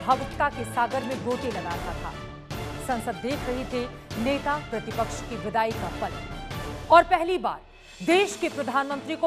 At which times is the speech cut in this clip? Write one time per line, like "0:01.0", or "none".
none